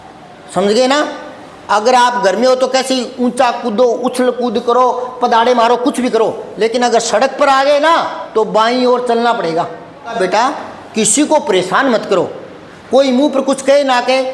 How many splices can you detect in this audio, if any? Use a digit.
1